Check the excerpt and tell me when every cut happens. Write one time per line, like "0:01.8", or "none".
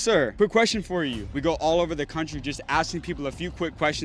0:01.2